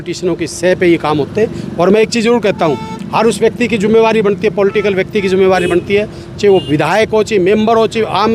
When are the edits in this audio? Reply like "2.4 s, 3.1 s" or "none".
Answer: none